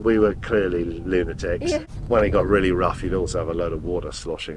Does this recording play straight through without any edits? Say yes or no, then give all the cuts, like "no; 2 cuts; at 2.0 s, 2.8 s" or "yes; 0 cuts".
no; 1 cut; at 1.9 s